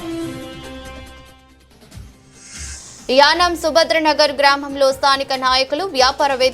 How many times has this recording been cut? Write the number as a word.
one